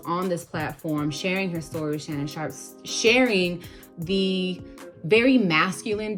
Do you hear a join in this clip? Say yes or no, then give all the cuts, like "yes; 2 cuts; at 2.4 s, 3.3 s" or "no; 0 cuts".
no; 0 cuts